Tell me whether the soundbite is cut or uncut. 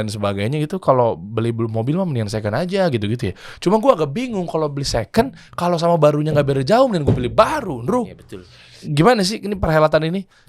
cut